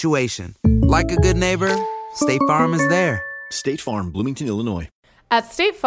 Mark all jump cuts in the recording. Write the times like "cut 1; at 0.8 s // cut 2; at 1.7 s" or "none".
cut 1; at 4.9 s